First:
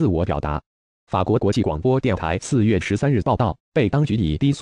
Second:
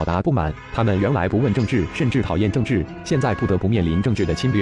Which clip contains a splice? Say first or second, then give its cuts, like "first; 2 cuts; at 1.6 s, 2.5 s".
first; 1 cut; at 2.8 s